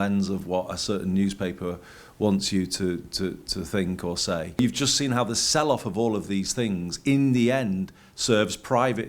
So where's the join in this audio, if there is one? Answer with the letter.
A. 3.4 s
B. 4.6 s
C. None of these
B